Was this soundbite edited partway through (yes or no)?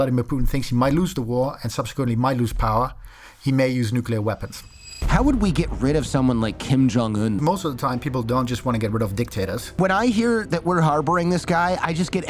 yes